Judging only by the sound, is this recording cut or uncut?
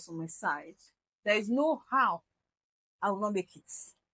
uncut